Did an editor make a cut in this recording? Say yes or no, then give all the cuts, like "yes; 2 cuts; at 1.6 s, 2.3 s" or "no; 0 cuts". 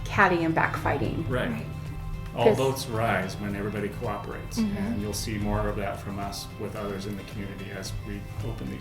yes; 1 cut; at 2.0 s